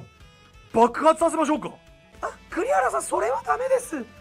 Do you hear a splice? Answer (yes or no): no